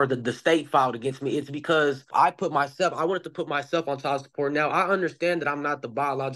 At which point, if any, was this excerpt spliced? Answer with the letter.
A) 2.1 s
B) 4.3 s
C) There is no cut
A